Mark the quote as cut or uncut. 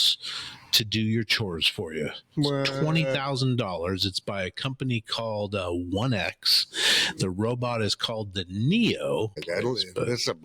cut